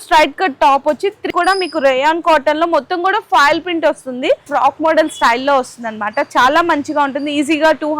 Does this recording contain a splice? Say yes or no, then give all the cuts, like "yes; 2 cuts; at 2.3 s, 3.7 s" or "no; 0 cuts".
yes; 2 cuts; at 1.2 s, 4.5 s